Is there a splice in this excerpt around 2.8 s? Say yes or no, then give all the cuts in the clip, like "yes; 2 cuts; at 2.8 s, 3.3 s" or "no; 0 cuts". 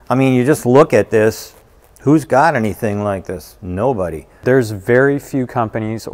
no; 1 cut; at 4.3 s